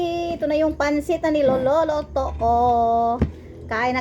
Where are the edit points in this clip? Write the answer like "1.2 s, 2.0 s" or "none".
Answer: none